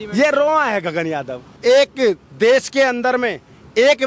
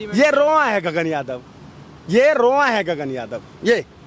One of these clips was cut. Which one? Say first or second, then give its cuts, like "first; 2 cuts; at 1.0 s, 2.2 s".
first; 1 cut; at 1.5 s